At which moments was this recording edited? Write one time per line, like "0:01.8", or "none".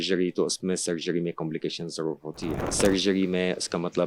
0:02.8